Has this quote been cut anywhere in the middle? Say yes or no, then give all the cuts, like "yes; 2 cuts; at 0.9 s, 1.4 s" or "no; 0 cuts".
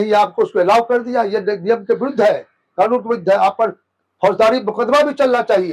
no; 0 cuts